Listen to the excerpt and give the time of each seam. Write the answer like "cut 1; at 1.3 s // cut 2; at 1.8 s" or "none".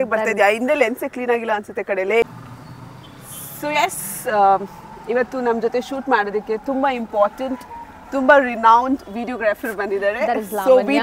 none